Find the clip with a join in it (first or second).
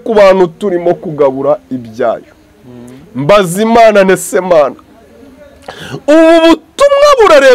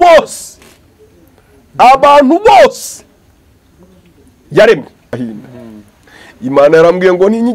second